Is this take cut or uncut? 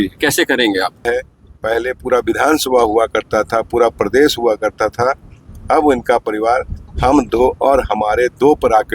cut